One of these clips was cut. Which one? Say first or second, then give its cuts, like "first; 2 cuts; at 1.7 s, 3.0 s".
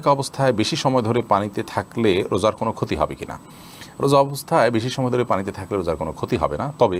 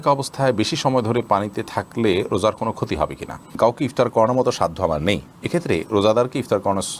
second; 1 cut; at 3.5 s